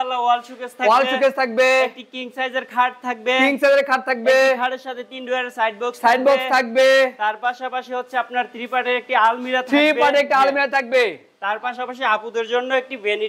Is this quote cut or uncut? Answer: uncut